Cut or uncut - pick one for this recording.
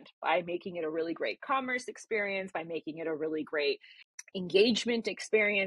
uncut